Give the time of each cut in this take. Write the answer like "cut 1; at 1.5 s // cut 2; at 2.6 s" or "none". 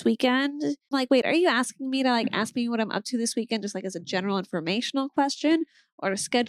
cut 1; at 0.9 s